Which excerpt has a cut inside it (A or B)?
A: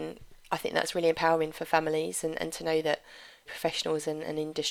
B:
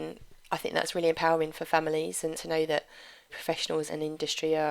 B